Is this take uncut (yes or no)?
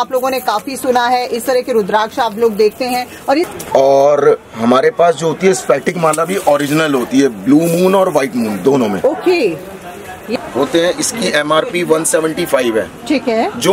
no